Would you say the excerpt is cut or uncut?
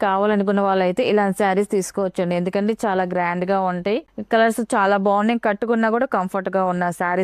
uncut